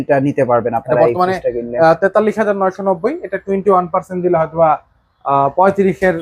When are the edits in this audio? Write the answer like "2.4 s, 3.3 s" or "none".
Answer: none